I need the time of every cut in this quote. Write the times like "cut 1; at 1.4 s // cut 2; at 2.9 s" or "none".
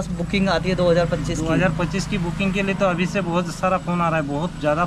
none